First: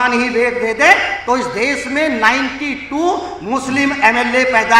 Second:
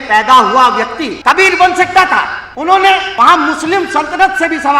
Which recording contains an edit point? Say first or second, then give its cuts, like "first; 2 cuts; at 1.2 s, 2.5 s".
second; 3 cuts; at 1.1 s, 2.4 s, 3.1 s